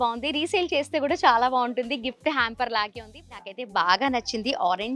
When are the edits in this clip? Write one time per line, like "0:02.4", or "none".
0:03.4